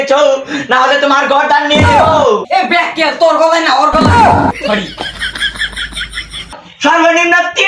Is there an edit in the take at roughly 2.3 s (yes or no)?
no